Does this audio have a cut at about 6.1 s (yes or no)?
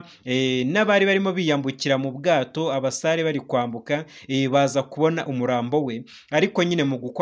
yes